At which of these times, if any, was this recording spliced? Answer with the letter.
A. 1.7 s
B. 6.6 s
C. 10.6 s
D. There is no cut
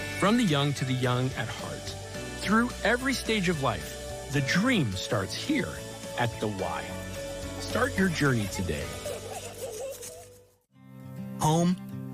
C